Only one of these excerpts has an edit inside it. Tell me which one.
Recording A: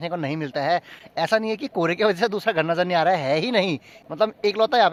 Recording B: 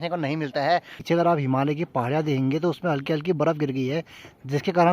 B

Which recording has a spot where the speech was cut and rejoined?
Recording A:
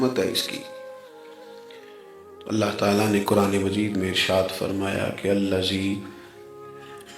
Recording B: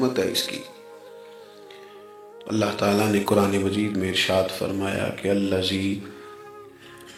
A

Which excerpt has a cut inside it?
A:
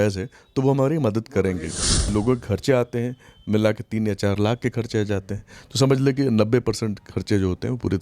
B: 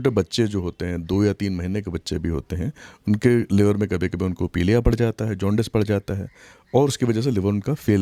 A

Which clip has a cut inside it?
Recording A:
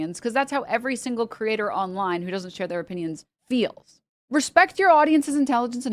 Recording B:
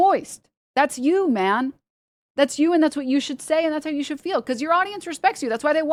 A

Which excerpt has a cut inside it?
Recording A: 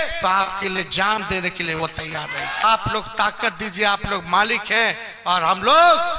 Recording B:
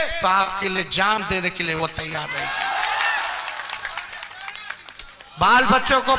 A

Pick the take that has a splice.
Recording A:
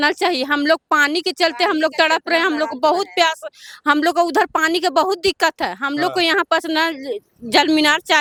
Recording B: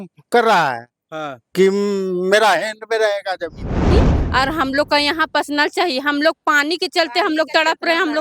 B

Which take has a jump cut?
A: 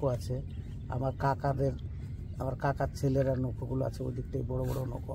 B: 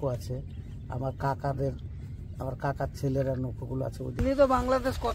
B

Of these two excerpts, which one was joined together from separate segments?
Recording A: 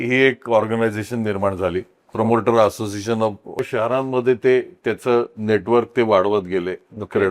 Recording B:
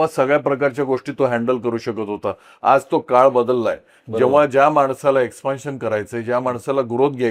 A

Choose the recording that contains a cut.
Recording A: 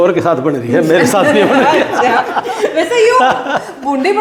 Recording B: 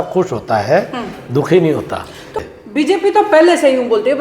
B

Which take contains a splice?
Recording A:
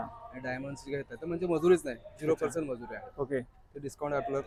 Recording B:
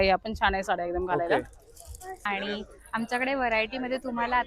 B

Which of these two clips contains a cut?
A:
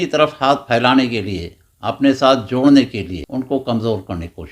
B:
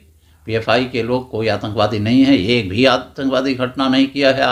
A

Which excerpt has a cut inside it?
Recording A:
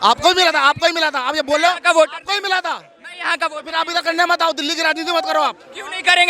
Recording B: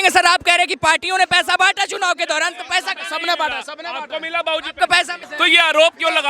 B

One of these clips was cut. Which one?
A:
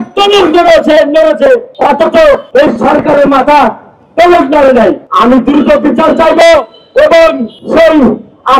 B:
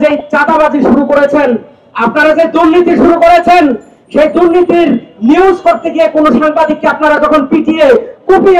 A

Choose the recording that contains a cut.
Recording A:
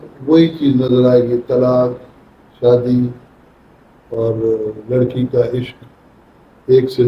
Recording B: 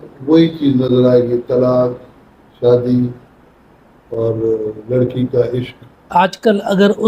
B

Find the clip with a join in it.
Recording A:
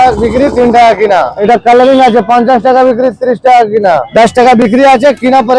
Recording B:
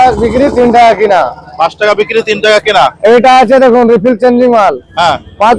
A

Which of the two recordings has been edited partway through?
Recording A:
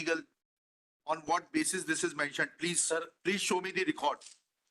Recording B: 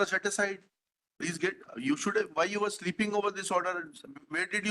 A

